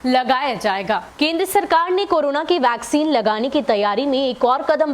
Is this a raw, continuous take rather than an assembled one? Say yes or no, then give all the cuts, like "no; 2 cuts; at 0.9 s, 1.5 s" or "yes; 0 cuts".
no; 1 cut; at 1.1 s